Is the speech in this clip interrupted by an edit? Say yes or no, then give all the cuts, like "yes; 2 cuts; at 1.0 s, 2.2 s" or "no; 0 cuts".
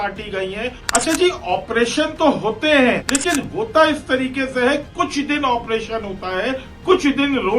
yes; 2 cuts; at 1.0 s, 3.0 s